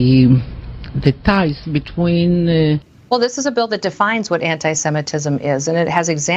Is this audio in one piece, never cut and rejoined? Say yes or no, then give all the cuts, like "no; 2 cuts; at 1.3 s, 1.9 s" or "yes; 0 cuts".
no; 1 cut; at 2.9 s